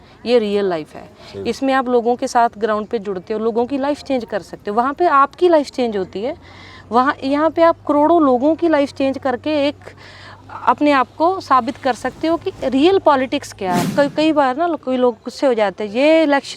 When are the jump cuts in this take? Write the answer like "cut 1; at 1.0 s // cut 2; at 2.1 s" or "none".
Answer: cut 1; at 13.9 s